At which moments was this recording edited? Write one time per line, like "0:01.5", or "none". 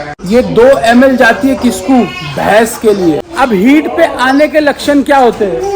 0:03.3